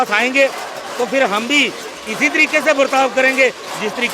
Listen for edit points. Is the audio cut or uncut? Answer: uncut